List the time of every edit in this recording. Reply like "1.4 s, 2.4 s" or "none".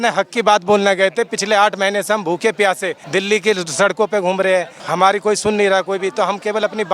2.9 s, 4.8 s